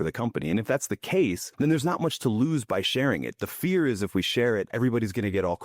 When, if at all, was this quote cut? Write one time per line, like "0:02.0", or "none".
0:01.4
0:04.7